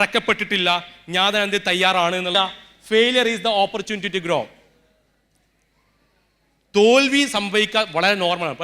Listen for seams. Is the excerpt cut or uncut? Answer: cut